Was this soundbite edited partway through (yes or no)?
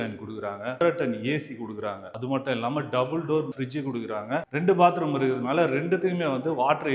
no